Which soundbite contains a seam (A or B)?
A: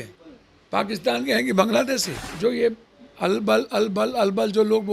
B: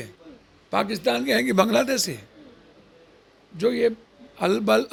A